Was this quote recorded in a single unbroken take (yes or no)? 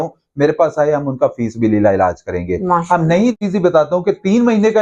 no